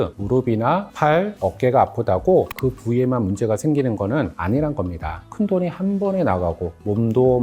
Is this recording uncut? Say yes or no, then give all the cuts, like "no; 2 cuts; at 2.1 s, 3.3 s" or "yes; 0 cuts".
no; 1 cut; at 5.2 s